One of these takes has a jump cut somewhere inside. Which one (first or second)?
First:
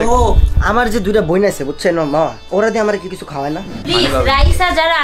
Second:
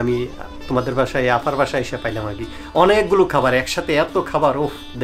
first